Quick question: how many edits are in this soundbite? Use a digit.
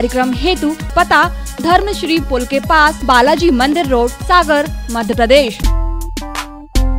4